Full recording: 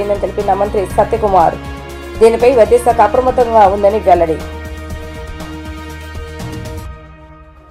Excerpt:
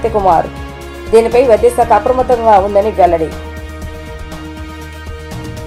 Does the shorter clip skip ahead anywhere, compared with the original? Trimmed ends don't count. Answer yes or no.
no